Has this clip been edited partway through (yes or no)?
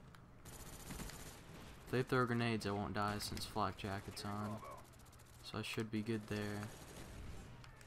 no